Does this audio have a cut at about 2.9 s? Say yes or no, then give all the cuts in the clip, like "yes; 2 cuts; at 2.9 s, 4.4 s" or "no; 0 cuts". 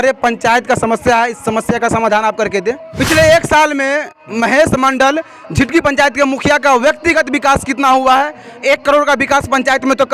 yes; 1 cut; at 2.9 s